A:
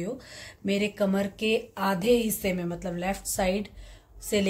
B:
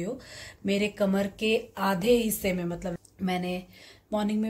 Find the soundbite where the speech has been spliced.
B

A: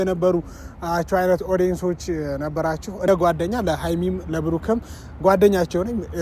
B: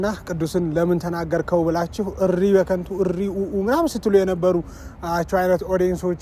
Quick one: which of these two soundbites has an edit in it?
A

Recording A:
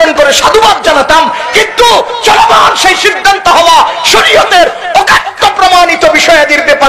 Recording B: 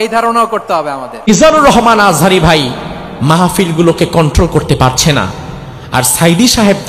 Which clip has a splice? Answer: B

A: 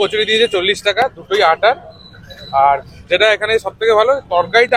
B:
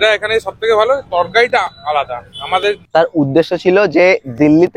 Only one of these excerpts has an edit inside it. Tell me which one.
B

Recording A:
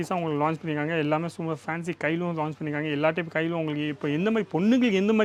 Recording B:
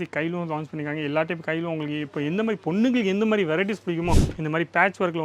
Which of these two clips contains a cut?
B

